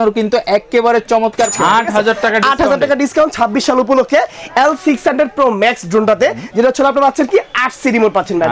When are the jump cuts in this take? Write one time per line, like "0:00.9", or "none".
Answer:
0:01.5